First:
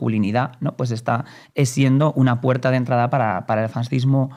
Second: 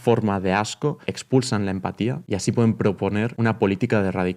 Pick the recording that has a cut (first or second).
second